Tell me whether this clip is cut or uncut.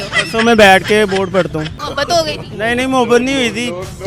cut